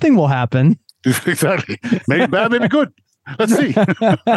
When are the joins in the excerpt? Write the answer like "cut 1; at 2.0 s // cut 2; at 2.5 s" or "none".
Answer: none